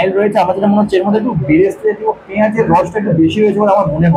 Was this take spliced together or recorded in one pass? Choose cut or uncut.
uncut